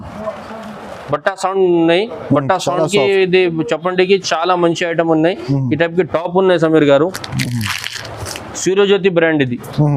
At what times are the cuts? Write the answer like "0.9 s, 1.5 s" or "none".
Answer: none